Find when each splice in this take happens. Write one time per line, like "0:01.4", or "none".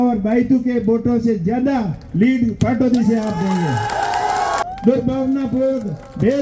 0:04.6

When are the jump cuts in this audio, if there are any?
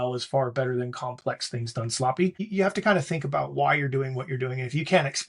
0:02.4

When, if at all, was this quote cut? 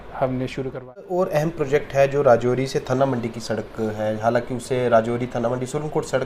0:01.1

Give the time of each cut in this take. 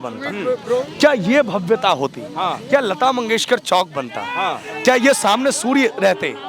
none

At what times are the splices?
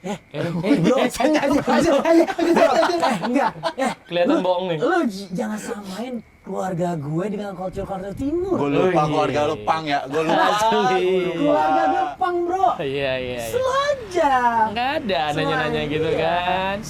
none

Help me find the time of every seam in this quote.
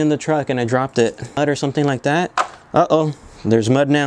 0:01.4

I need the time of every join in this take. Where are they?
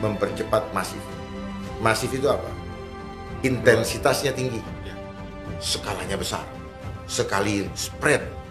none

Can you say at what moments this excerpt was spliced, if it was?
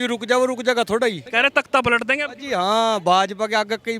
0:01.2

